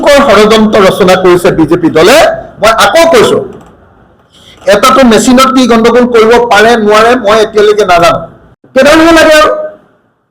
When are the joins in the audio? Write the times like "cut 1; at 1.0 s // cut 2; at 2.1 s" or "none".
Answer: none